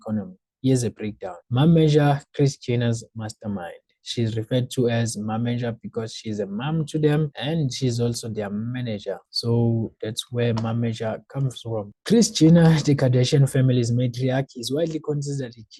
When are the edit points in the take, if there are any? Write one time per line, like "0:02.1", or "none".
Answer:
none